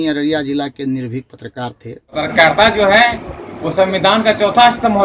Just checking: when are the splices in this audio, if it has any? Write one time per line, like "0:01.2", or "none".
0:02.3